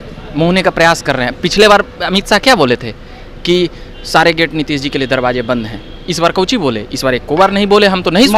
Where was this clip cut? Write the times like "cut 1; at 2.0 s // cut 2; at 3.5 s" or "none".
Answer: none